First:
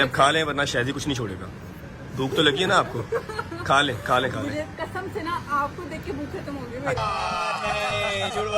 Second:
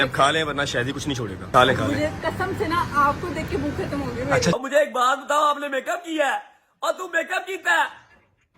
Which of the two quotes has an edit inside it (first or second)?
second